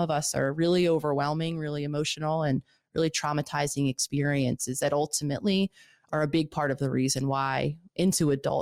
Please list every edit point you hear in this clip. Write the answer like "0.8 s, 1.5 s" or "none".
none

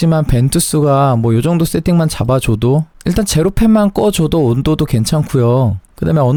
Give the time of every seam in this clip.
none

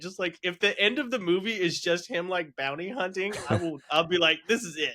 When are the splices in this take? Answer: none

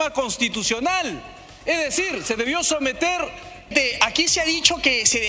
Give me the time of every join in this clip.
3.7 s

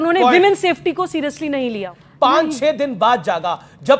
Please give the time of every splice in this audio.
1.9 s

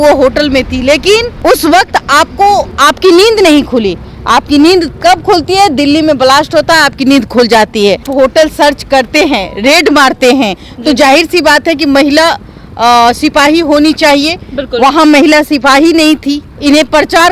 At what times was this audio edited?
1.3 s, 2.7 s, 8.1 s, 16.5 s

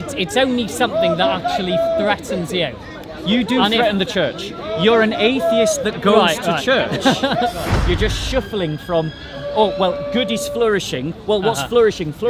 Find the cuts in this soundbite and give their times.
7.7 s

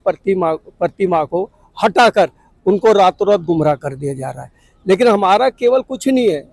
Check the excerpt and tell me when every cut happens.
none

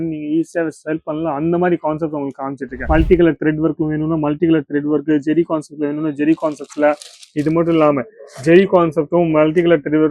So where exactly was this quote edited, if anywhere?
2.7 s

